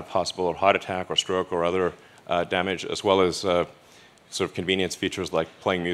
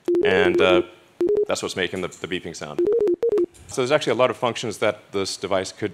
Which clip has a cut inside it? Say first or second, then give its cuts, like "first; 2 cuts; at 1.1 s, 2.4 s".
second; 1 cut; at 3.6 s